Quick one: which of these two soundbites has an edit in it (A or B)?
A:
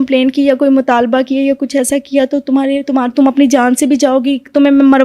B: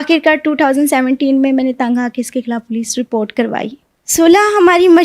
B